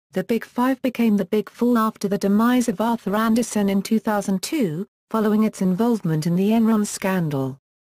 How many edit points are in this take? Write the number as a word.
one